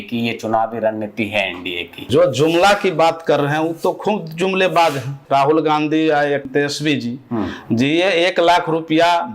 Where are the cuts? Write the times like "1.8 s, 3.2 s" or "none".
2.1 s, 5.2 s, 6.4 s